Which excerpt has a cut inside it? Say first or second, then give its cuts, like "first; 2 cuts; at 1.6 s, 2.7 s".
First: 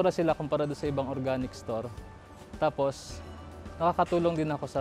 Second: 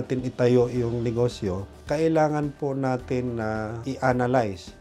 second; 2 cuts; at 1.7 s, 3.8 s